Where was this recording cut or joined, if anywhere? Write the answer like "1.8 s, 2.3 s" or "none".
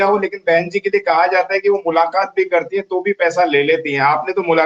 none